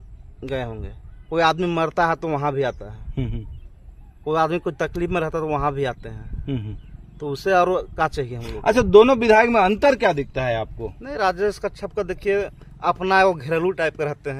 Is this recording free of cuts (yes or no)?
yes